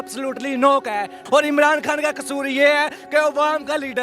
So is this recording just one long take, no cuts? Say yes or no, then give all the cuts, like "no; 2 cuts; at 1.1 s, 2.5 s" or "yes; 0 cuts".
no; 1 cut; at 1.2 s